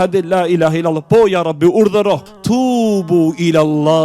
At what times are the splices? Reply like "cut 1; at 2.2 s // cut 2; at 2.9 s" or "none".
cut 1; at 2.3 s